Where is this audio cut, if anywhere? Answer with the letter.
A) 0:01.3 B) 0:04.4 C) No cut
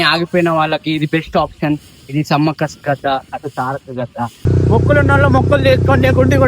B